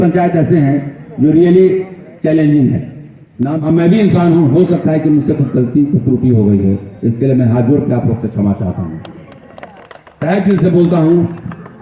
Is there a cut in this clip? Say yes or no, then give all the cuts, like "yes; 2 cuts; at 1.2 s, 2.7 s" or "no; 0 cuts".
yes; 1 cut; at 3.5 s